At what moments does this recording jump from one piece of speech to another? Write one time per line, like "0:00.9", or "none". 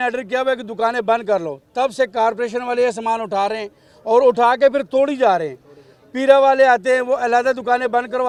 none